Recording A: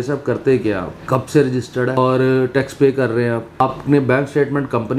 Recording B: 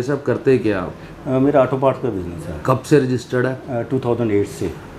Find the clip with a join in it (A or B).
A